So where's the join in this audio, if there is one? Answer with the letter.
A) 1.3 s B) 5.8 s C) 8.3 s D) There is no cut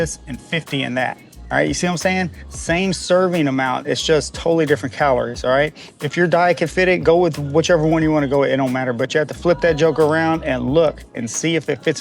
D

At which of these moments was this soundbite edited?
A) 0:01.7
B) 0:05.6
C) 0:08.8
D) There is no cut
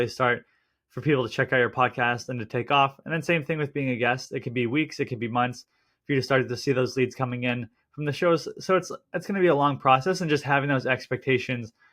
D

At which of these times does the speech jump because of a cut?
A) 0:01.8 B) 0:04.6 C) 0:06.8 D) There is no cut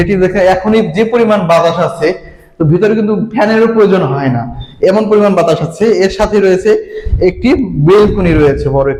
D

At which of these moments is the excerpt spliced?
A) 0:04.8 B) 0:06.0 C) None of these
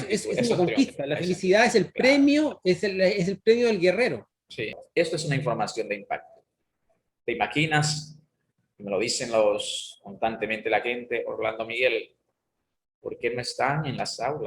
A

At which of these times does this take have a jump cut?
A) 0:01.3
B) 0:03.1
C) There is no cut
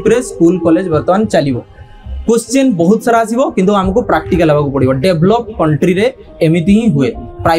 C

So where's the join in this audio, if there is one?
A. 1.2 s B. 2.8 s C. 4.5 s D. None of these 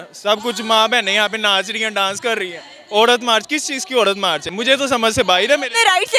D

